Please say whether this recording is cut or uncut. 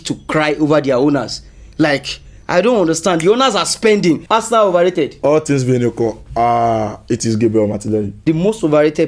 cut